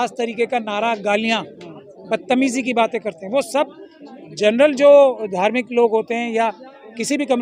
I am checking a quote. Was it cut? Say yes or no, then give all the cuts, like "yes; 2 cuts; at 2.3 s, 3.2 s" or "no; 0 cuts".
no; 0 cuts